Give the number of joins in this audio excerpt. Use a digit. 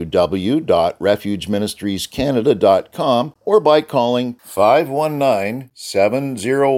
1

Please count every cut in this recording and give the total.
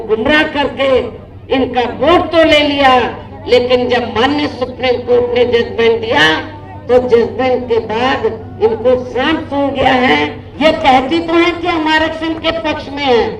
1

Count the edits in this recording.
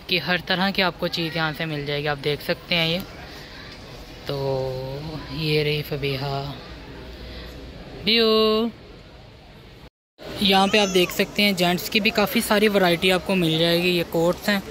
0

